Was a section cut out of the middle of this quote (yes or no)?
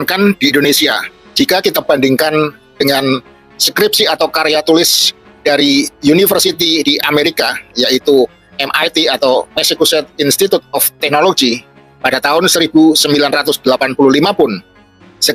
no